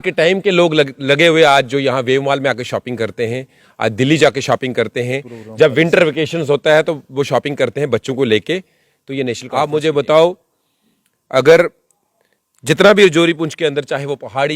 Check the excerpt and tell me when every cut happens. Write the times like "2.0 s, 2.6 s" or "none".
9.4 s